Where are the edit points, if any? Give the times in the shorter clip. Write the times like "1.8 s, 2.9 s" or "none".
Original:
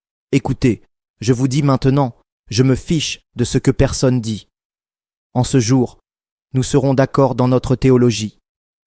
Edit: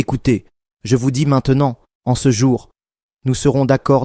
1.9 s